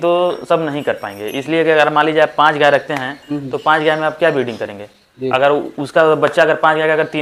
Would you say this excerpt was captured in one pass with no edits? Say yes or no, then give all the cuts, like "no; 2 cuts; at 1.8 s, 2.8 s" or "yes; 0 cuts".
yes; 0 cuts